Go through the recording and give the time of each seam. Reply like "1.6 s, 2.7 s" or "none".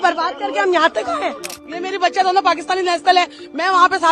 1.6 s